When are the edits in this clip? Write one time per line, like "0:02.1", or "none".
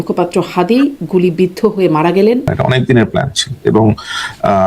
0:02.5